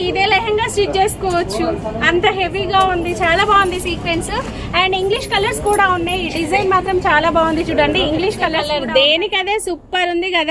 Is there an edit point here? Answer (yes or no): yes